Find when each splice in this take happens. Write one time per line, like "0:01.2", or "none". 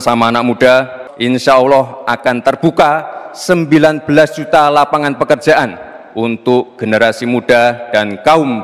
none